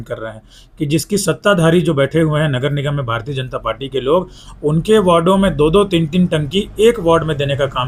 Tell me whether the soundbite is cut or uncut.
uncut